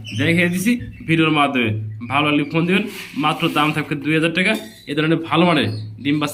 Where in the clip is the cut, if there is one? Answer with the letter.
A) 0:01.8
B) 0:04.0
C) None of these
C